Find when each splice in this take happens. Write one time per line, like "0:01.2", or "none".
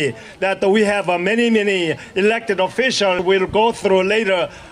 0:03.2